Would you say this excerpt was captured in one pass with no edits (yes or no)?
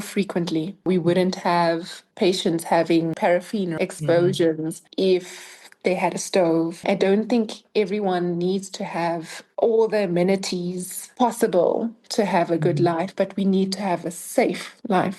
no